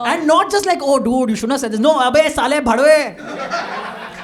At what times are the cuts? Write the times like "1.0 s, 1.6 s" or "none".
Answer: none